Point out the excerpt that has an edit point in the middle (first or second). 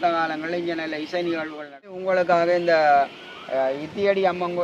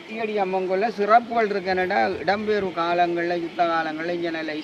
first